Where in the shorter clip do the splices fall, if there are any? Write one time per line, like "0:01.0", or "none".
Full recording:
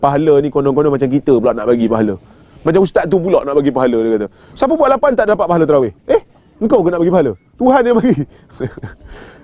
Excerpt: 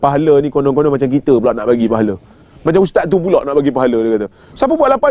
none